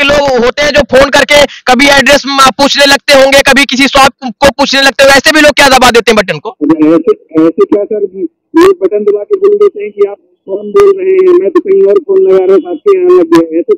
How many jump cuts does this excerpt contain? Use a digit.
0